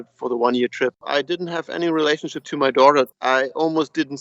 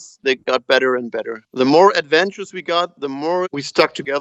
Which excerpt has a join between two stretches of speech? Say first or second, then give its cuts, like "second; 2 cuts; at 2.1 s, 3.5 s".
first; 2 cuts; at 1.0 s, 3.2 s